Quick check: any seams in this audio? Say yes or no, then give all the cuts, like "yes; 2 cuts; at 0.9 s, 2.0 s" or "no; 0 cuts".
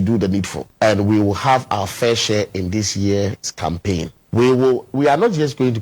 no; 0 cuts